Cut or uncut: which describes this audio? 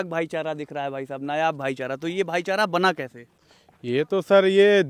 uncut